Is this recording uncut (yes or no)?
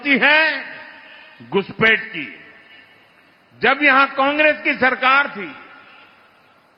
no